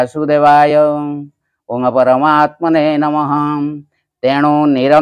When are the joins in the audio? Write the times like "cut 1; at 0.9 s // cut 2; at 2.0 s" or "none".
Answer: none

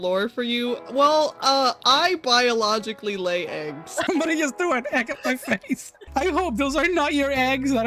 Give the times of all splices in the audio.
cut 1; at 4.0 s // cut 2; at 6.0 s

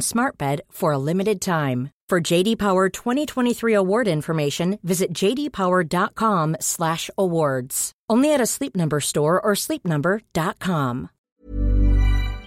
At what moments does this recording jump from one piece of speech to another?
cut 1; at 11.1 s

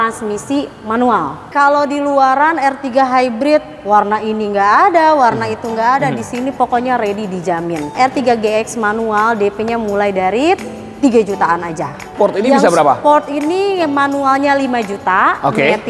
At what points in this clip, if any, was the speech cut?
cut 1; at 1.5 s // cut 2; at 7.9 s // cut 3; at 12.1 s

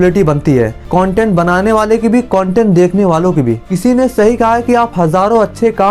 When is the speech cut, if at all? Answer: cut 1; at 3.6 s

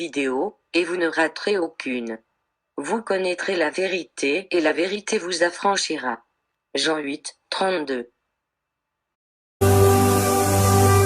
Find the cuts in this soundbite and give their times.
cut 1; at 9.6 s

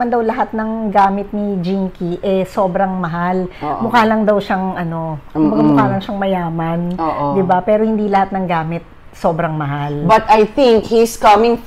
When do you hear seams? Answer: none

